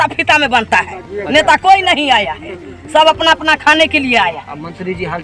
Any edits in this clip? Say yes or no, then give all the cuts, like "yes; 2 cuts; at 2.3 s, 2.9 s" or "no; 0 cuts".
no; 0 cuts